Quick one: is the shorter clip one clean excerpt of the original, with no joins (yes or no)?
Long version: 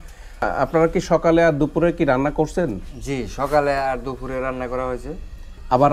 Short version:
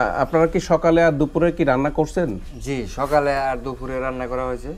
yes